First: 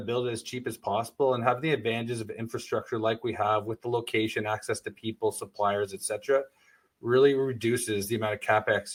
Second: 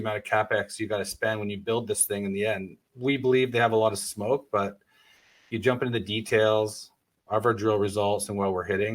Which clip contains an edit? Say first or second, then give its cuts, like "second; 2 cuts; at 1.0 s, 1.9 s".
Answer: second; 1 cut; at 2.8 s